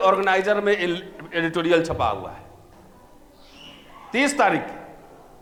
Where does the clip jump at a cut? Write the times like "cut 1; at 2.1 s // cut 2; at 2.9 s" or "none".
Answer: none